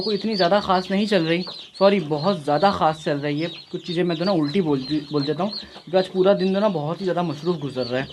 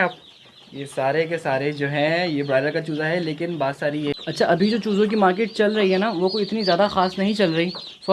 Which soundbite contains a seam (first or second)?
second